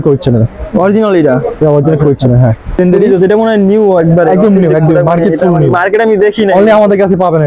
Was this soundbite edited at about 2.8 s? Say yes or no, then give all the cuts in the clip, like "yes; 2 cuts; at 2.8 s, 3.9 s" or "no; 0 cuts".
yes; 1 cut; at 2.8 s